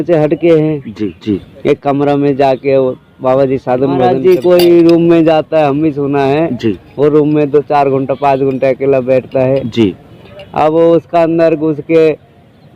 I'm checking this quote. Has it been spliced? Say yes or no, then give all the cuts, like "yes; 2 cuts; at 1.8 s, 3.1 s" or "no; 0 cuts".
yes; 2 cuts; at 1.2 s, 4.1 s